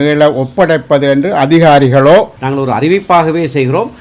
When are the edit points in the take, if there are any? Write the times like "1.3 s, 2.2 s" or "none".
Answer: 2.4 s

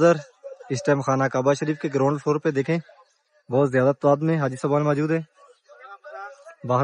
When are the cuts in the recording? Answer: none

